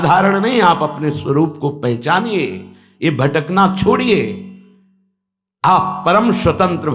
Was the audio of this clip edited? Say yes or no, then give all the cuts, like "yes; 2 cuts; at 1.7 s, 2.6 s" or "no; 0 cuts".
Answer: no; 0 cuts